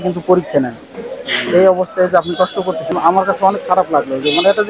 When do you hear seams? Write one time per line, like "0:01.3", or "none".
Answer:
0:02.9